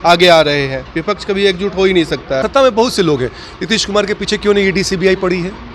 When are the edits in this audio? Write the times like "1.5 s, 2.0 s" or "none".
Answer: 2.4 s